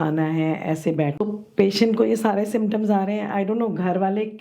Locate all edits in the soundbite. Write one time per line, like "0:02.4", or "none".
0:01.1